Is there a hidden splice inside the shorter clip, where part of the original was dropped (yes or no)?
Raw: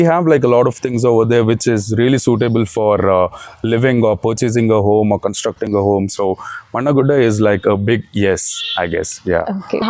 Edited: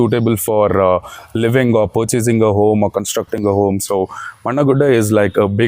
no